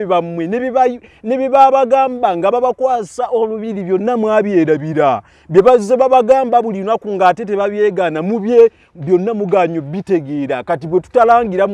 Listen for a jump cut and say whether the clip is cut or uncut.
uncut